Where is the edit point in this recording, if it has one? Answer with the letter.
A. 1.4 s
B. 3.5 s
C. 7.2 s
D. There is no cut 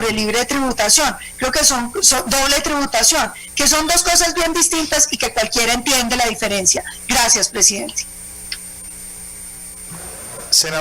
D